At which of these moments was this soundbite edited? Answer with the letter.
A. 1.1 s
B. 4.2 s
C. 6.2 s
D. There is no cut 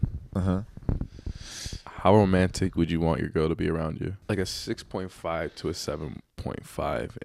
B